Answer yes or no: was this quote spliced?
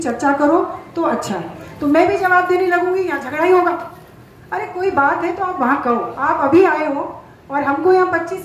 yes